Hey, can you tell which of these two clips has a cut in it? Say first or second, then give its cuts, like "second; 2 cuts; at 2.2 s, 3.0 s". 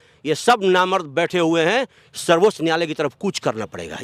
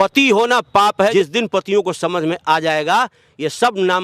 second; 1 cut; at 1.1 s